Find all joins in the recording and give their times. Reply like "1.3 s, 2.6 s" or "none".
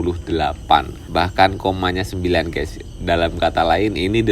1.0 s